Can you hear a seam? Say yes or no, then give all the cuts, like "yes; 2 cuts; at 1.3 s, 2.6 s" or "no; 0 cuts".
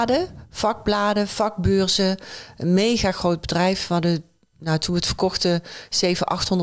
no; 0 cuts